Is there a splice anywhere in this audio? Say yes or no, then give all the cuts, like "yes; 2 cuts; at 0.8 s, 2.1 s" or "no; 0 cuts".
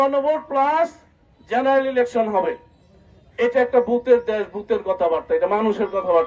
no; 0 cuts